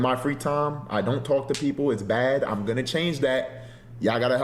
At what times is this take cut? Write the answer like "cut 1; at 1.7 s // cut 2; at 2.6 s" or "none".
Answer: none